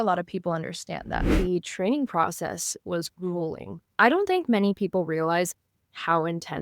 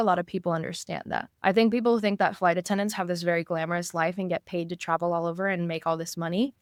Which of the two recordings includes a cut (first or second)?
first